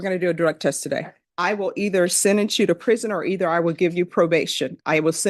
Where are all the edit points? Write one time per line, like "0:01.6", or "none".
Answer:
0:01.2